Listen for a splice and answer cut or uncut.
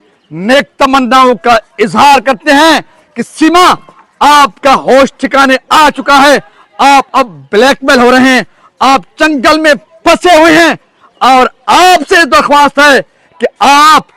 uncut